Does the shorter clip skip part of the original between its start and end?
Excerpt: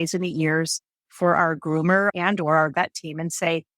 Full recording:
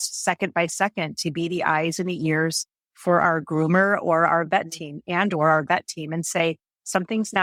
yes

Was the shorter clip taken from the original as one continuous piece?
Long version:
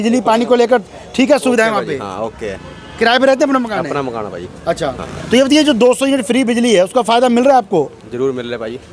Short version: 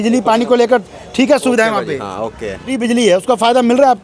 no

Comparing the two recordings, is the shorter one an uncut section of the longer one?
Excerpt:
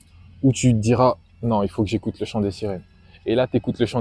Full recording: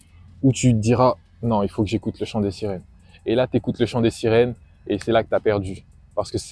yes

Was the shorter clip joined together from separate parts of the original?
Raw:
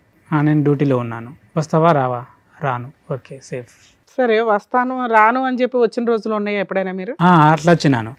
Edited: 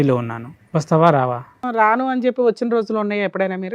yes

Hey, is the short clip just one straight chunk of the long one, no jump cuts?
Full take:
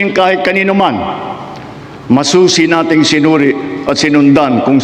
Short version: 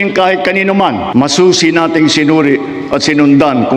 no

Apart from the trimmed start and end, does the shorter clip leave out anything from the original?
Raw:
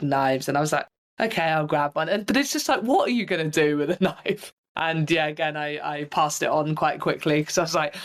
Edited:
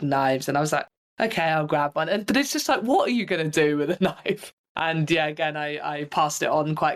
no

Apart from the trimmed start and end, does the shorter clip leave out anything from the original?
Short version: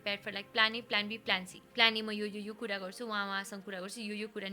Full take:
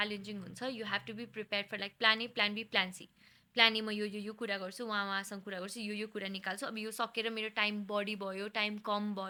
yes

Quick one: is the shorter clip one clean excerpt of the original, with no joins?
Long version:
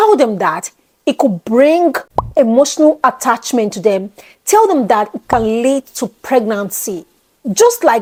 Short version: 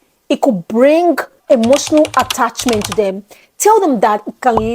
no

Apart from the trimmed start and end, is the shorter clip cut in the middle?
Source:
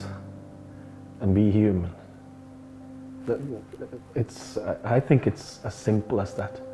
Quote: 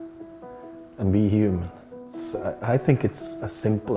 yes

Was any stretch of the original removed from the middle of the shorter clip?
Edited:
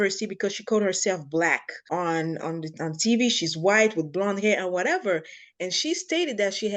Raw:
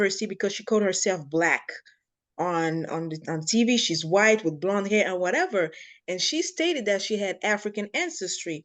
yes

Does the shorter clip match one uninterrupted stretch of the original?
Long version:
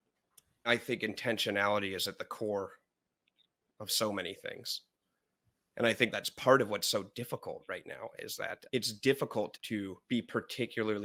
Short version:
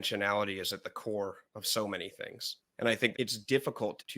no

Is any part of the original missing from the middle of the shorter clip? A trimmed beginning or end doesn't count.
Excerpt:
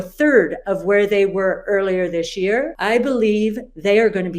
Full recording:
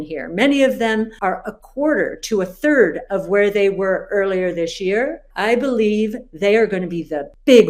yes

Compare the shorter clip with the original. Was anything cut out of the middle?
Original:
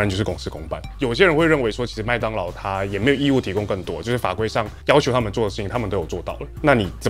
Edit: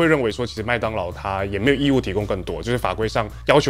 no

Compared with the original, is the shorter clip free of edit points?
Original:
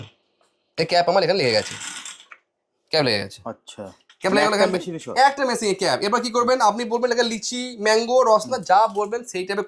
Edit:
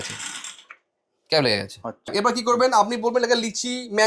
no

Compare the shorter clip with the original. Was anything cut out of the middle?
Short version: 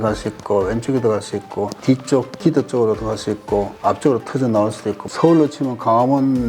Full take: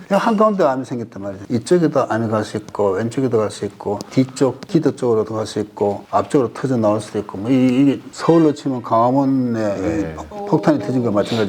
yes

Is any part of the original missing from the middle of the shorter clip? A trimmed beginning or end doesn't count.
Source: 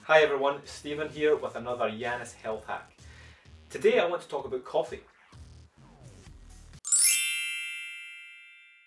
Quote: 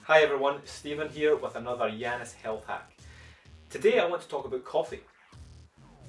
no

